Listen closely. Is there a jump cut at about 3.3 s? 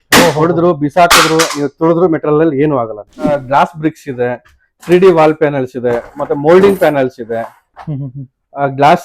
yes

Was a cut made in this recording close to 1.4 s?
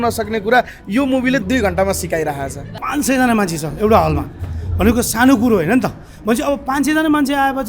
yes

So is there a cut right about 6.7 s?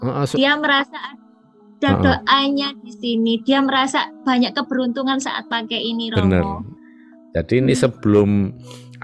yes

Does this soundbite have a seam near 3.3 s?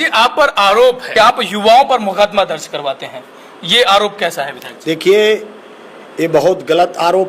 no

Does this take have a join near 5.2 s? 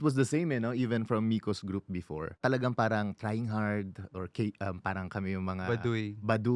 no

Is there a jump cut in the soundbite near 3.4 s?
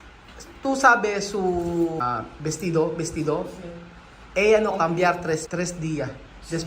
no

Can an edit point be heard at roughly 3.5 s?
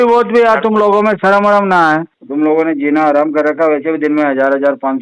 no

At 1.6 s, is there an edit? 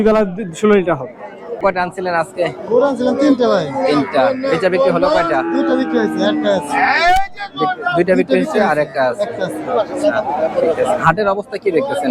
yes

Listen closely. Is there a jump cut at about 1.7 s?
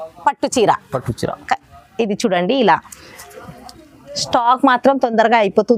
no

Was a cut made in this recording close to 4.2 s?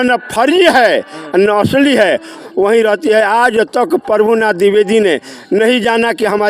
no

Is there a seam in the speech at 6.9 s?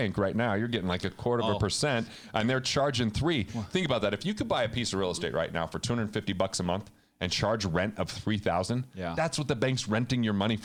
no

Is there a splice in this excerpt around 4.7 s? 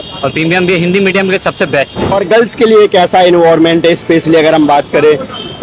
no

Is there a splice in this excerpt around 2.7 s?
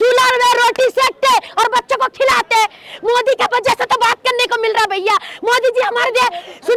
no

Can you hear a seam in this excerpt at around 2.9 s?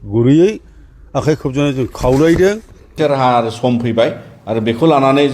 yes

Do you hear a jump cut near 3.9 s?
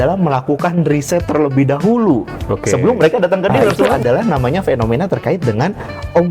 yes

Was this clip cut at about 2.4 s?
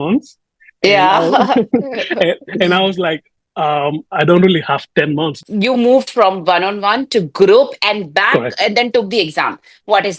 no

